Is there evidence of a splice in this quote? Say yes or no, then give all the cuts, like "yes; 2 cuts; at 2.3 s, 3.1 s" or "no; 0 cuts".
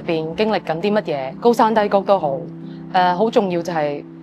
yes; 1 cut; at 1.3 s